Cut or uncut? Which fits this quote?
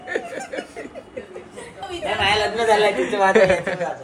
uncut